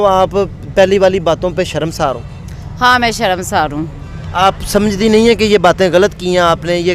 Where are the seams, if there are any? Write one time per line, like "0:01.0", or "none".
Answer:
none